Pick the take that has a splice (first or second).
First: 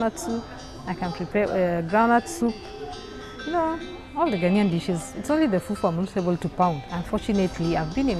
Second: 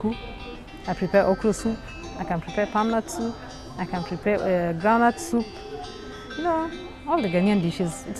first